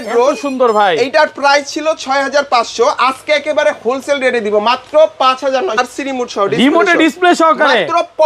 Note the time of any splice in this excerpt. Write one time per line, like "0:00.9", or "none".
0:05.8